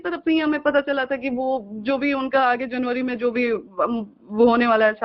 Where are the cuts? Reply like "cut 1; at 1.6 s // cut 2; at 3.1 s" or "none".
none